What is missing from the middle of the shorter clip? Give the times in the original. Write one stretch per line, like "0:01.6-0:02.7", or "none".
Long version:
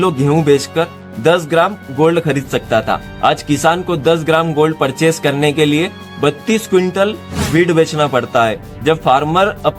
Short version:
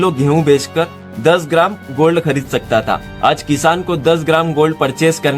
none